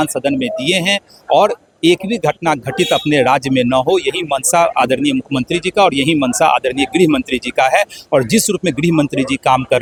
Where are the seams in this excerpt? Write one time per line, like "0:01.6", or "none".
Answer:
none